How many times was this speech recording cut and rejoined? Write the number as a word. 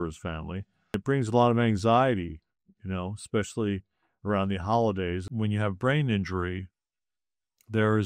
two